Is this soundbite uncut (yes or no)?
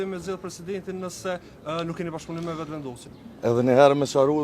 no